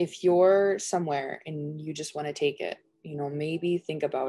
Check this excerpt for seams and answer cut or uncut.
uncut